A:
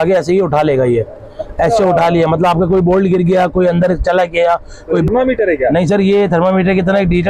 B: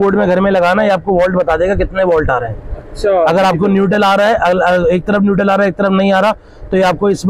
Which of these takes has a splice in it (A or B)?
A